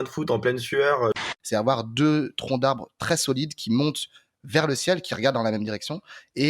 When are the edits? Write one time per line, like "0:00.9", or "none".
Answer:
0:01.2